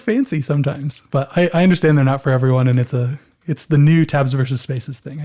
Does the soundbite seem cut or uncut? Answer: cut